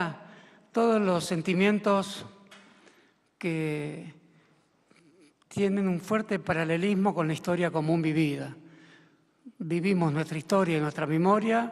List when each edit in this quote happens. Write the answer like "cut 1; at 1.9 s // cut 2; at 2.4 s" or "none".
cut 1; at 10.1 s